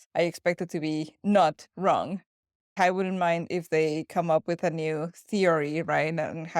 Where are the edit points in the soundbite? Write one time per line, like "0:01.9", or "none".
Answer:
0:02.7